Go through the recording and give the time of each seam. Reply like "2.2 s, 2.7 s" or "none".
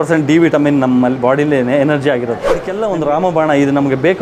2.7 s